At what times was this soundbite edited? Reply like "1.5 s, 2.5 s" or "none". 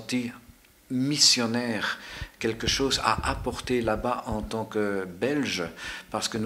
none